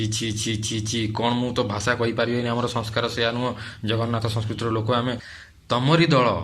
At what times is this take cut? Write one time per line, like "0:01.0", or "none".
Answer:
0:05.3